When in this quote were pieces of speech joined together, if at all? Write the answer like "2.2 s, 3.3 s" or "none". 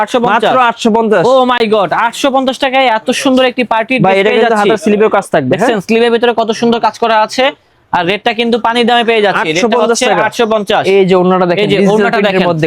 none